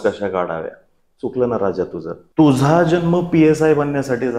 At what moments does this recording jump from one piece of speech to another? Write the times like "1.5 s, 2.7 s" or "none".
2.2 s